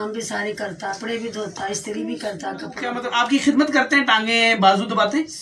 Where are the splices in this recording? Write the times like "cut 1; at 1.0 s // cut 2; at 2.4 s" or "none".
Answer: cut 1; at 1.0 s // cut 2; at 2.9 s